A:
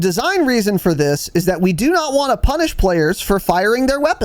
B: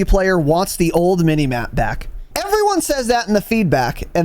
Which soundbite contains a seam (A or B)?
B